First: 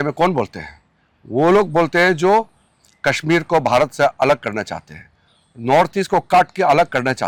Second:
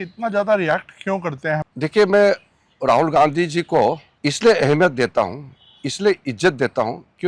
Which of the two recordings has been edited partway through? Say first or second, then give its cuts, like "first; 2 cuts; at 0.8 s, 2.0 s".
second; 2 cuts; at 1.7 s, 4.1 s